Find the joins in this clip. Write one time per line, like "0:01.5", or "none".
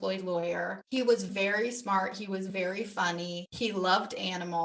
0:03.4